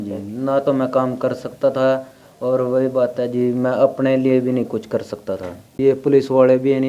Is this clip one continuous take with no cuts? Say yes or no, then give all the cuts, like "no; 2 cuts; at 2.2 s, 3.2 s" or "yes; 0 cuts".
no; 1 cut; at 5.8 s